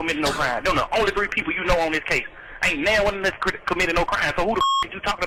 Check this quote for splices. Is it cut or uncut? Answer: uncut